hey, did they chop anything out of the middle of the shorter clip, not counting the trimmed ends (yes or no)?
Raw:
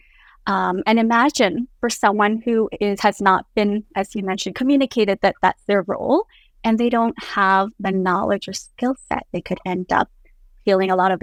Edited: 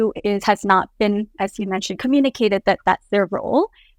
no